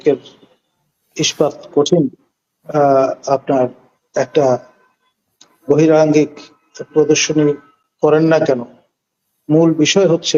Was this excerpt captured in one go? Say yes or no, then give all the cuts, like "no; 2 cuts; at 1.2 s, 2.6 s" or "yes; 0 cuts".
yes; 0 cuts